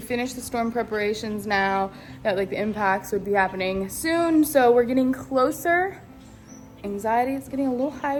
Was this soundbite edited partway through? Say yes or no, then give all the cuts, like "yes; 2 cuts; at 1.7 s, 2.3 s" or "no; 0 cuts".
no; 0 cuts